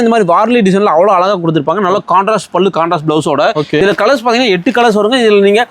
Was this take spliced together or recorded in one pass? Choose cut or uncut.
cut